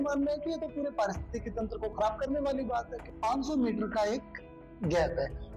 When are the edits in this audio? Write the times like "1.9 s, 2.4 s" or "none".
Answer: 3.0 s